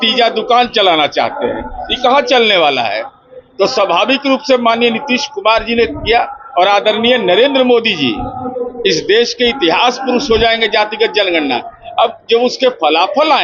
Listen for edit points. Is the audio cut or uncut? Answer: uncut